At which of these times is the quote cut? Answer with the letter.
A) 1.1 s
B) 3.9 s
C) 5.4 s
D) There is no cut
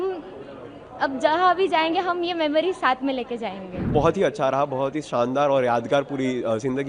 B